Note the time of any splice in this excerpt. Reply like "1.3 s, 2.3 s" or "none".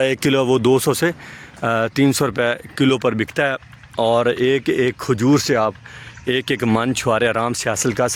none